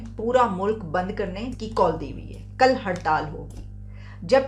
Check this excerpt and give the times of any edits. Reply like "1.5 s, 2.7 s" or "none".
1.5 s